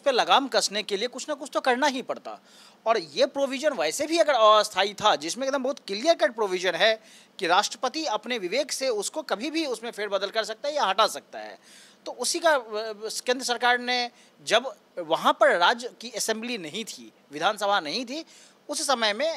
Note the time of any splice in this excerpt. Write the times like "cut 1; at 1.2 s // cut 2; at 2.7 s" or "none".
none

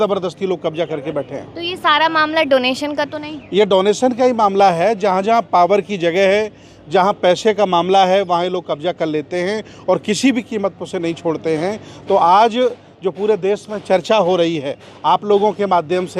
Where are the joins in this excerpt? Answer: none

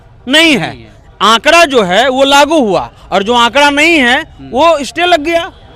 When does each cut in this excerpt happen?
none

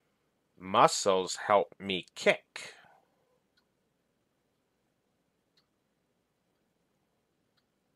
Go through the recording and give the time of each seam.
none

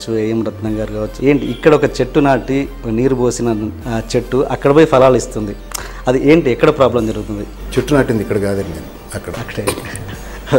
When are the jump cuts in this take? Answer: cut 1; at 1.2 s // cut 2; at 7.5 s

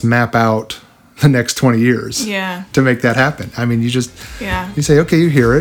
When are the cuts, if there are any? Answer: none

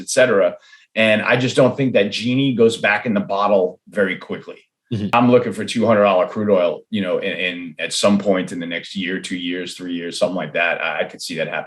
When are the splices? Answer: cut 1; at 5.1 s

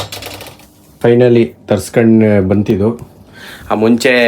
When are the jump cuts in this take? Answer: cut 1; at 1.0 s

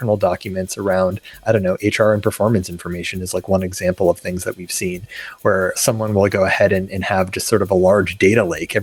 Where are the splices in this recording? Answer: none

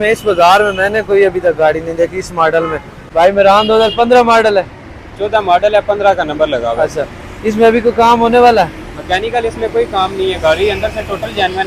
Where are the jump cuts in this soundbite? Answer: cut 1; at 3.0 s

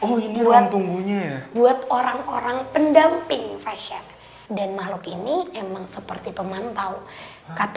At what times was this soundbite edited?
none

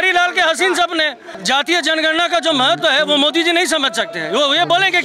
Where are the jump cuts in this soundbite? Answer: cut 1; at 1.4 s

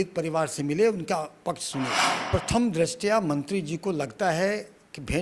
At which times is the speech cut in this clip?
cut 1; at 2.2 s

